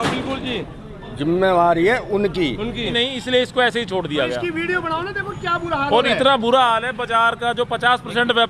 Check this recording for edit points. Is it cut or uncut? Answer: cut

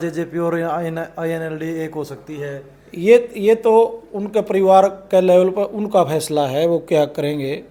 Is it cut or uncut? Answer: uncut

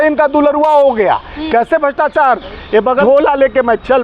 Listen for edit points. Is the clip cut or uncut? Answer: cut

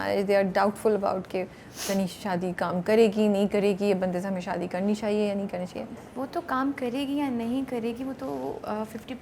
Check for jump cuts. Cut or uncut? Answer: uncut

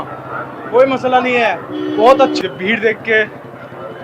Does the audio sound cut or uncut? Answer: cut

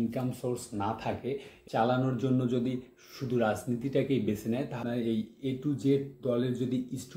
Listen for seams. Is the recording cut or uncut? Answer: cut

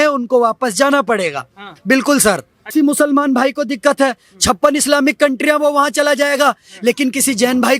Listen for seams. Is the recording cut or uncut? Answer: cut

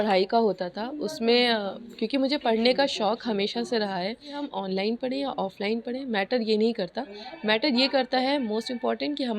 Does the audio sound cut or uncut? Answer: cut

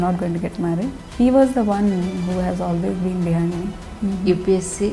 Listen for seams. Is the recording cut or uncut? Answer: cut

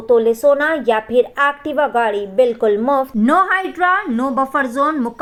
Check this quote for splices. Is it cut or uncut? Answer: uncut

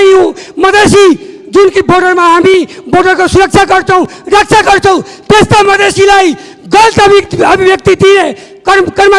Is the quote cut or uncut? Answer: uncut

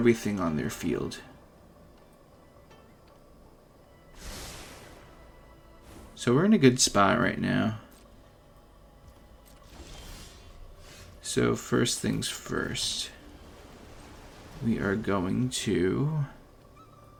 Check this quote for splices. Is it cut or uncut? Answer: uncut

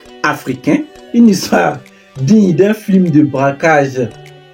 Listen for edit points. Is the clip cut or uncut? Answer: cut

